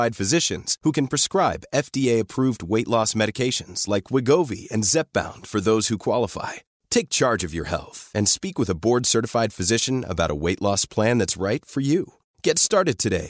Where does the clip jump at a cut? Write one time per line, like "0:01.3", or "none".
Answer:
none